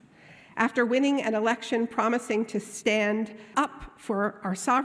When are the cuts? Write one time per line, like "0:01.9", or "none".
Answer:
0:03.5